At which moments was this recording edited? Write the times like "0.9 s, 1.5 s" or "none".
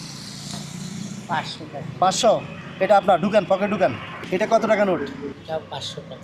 4.1 s, 5.3 s